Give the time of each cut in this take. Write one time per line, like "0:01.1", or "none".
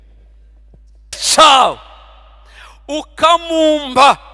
0:01.2